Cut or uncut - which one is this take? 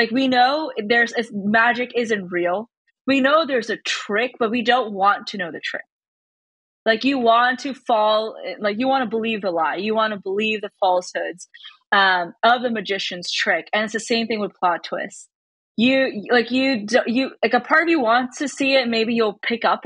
uncut